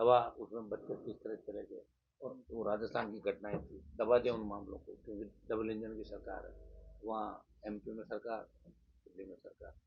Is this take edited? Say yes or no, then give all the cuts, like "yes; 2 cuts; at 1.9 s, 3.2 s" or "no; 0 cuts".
no; 0 cuts